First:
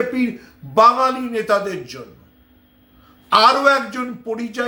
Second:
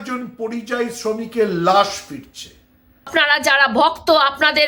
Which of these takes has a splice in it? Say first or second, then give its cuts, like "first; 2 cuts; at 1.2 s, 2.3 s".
second; 1 cut; at 3.1 s